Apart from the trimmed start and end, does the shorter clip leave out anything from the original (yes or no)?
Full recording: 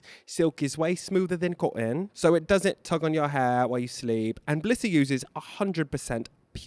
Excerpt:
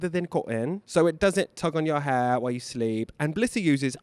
no